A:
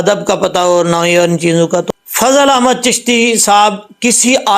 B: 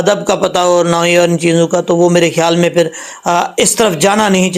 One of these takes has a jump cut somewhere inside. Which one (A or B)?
A